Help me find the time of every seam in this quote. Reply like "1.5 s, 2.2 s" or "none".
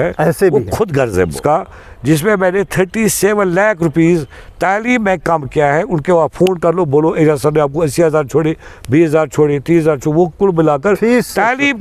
1.3 s